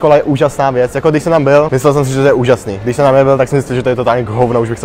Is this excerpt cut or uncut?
cut